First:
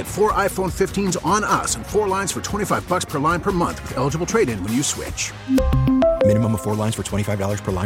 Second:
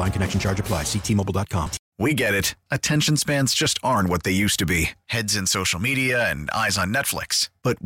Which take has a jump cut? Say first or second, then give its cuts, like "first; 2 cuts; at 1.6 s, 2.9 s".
second; 1 cut; at 1.8 s